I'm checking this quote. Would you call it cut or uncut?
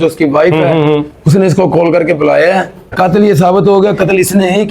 cut